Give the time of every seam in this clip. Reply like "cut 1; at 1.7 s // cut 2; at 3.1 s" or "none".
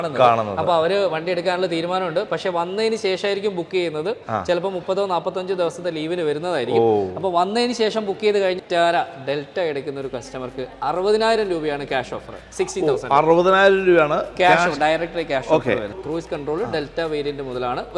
cut 1; at 8.6 s // cut 2; at 16.0 s